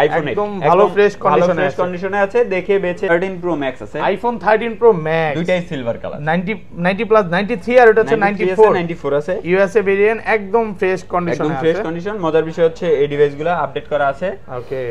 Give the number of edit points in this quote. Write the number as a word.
one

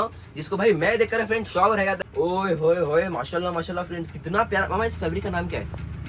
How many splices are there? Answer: one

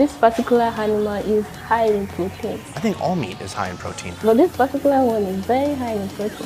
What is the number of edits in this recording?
two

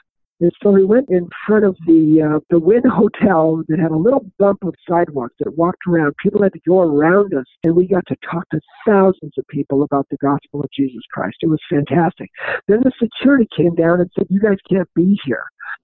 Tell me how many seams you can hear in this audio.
three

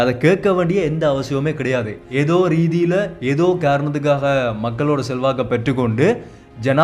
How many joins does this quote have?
one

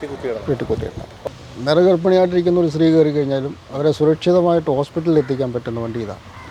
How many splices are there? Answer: one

